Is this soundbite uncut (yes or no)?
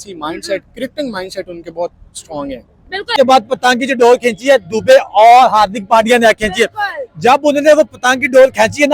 no